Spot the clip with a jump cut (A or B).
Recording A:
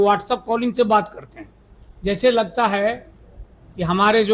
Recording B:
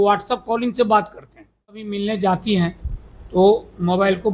B